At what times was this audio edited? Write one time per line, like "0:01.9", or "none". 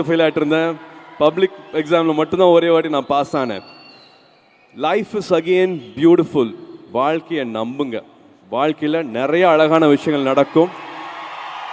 none